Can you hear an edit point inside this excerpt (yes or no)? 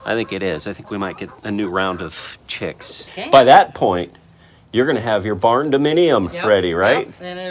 yes